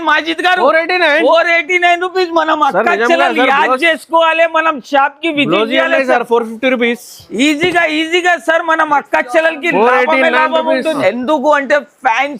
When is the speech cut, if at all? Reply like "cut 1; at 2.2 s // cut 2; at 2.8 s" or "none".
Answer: cut 1; at 11.0 s